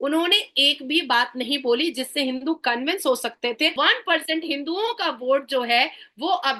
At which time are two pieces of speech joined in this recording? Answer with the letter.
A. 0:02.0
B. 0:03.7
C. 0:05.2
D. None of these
B